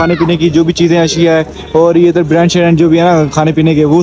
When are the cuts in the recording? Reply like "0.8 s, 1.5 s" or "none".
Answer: none